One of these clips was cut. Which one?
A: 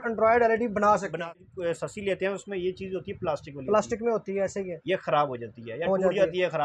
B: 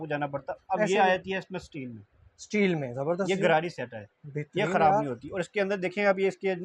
A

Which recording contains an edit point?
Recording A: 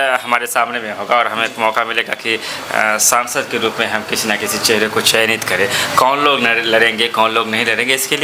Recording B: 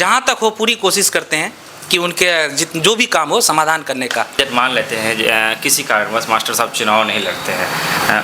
B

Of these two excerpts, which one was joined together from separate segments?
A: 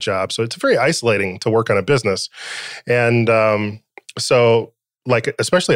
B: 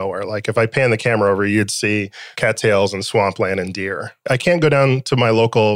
B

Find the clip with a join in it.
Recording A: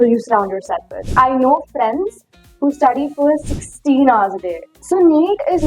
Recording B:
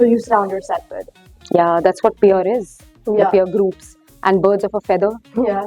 A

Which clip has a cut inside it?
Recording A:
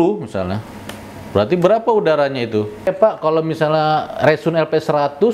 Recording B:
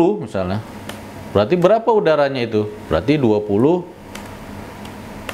A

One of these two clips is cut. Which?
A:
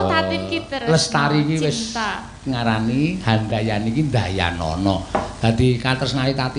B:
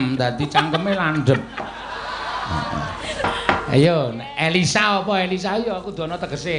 B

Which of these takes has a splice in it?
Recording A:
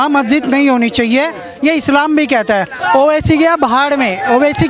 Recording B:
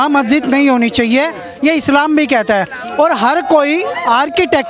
A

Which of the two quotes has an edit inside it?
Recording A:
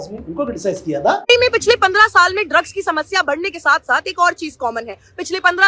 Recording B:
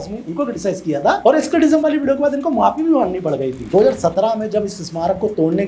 B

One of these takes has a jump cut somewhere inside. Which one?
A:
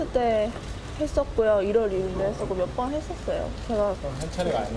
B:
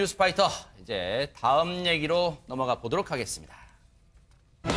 A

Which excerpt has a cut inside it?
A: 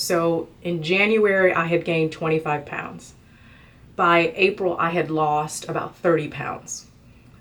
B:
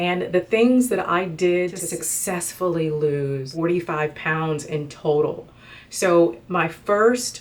B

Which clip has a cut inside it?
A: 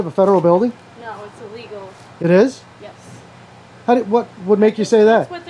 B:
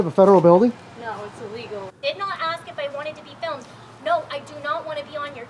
B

